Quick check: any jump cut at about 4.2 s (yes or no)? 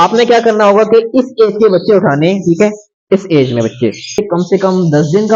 yes